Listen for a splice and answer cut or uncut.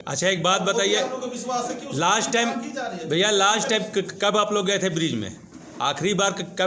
uncut